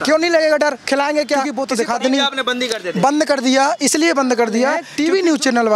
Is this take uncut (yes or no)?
no